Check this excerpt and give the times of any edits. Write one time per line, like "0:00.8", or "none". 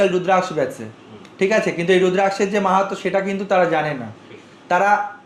none